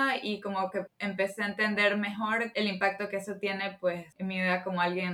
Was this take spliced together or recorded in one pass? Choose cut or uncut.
cut